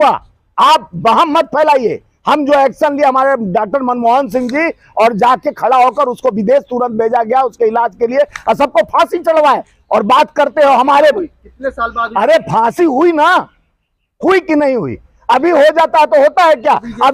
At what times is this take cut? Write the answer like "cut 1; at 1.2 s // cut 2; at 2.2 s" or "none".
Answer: none